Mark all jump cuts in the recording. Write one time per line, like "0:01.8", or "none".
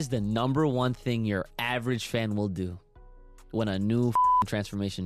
none